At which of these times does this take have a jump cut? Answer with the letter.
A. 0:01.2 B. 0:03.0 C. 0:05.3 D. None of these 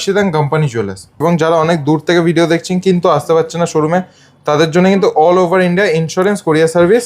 A